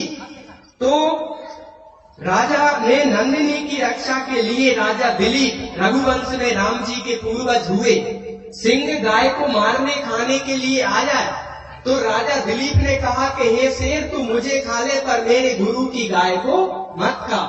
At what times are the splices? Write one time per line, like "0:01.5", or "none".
0:05.2
0:10.8